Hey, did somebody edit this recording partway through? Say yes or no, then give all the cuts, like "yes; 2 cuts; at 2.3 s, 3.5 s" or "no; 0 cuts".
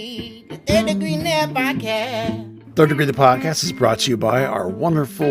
yes; 1 cut; at 2.6 s